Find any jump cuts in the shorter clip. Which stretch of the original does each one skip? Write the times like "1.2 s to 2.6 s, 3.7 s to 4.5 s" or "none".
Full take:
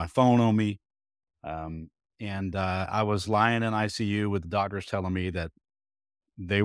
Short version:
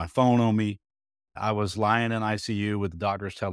1.3 s to 2.8 s